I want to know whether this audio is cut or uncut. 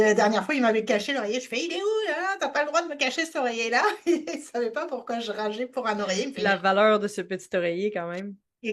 uncut